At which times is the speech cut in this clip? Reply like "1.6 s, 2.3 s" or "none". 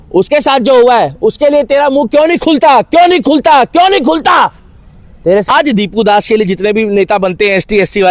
5.5 s